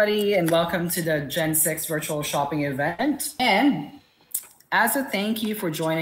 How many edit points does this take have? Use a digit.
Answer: 1